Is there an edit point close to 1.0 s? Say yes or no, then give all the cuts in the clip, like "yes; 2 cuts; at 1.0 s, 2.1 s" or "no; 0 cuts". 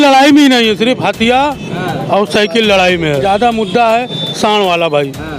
no; 1 cut; at 3.2 s